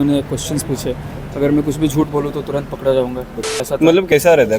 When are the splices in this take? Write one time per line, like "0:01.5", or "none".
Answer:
0:03.4